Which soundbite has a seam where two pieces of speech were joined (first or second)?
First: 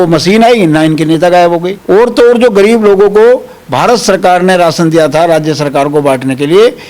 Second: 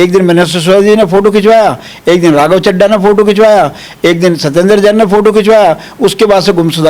first